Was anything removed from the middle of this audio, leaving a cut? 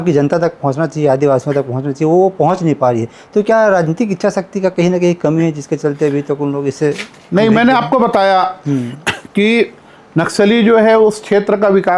no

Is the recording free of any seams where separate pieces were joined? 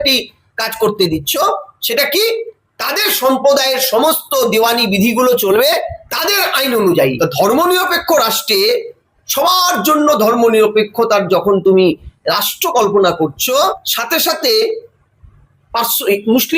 no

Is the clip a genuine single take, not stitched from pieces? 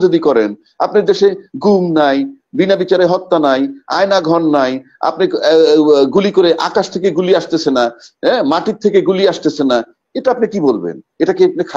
yes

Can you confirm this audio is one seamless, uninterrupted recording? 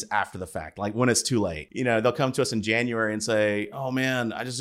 no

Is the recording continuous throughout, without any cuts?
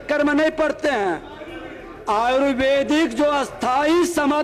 yes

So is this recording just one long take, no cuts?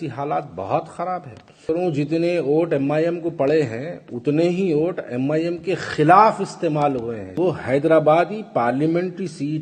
no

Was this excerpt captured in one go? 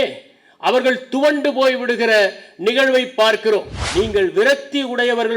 no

